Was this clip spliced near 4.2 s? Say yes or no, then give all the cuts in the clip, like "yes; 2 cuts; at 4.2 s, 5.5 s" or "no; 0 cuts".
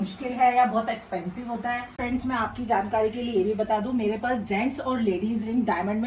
no; 1 cut; at 2.0 s